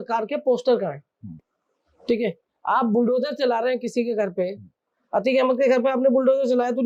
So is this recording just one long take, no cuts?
yes; 0 cuts

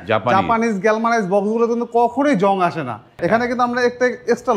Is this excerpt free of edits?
no; 1 cut; at 3.1 s

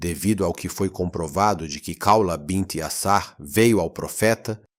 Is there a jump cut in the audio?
no; 0 cuts

